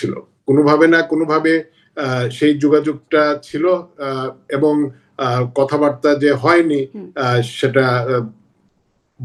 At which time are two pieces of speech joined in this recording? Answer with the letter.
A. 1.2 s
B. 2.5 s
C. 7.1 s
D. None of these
D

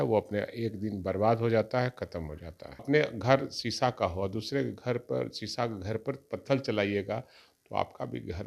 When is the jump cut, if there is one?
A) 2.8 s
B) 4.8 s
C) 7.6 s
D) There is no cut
A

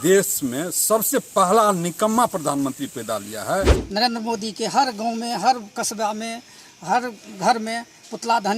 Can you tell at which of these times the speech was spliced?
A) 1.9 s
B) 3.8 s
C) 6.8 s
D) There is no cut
B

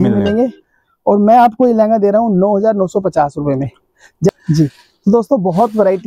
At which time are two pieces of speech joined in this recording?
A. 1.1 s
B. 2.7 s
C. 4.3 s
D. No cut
C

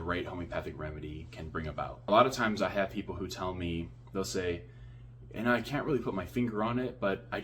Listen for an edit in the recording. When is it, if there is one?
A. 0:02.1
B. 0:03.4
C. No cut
A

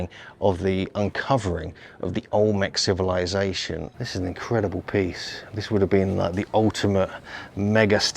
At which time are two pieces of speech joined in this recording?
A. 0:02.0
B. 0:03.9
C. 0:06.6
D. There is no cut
B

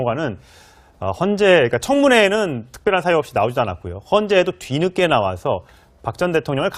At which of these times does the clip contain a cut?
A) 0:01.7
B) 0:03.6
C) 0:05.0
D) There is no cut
C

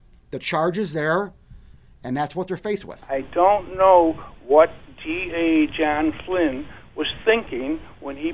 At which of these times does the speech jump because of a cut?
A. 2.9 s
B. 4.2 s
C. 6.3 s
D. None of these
A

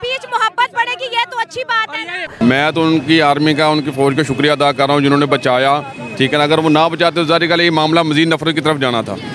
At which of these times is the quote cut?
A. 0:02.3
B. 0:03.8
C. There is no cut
A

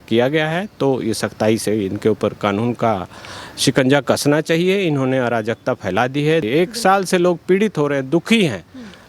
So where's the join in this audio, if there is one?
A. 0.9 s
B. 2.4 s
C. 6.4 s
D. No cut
C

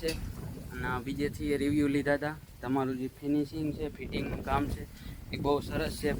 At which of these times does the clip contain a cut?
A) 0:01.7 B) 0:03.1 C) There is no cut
C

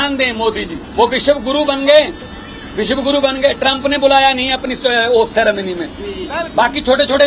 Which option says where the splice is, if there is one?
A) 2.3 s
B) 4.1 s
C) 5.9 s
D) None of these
D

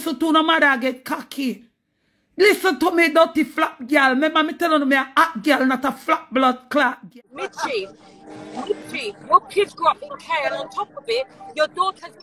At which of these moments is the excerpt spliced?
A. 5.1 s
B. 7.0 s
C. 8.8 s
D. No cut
B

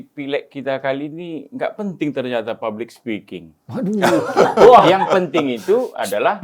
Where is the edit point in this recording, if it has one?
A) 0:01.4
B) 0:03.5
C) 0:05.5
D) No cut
D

